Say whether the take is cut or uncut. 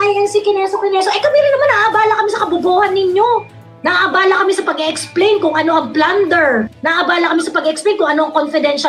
uncut